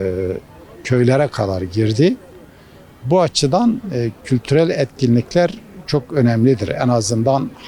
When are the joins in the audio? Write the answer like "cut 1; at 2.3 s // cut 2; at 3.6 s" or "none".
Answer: none